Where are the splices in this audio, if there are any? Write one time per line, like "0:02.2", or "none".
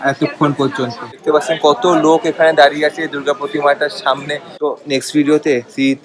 0:01.1
0:04.5